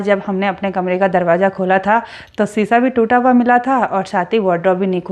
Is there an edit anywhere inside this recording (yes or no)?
no